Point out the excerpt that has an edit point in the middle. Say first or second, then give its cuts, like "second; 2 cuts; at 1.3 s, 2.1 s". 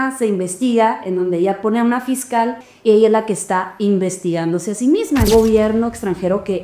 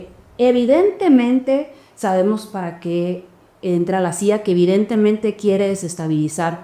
first; 2 cuts; at 2.7 s, 5.3 s